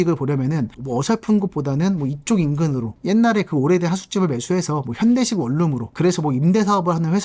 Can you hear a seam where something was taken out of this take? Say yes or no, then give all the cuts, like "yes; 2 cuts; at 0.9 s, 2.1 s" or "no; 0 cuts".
yes; 2 cuts; at 2.9 s, 5.9 s